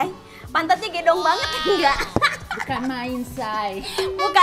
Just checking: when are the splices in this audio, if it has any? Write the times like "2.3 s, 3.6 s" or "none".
none